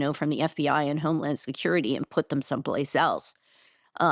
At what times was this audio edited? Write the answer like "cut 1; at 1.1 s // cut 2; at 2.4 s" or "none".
none